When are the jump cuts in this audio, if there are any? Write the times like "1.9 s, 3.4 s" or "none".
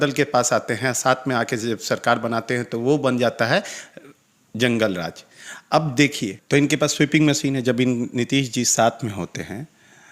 none